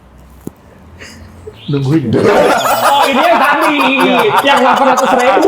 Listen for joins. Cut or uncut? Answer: cut